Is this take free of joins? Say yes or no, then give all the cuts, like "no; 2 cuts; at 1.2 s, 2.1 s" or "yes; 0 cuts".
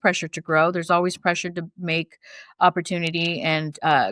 yes; 0 cuts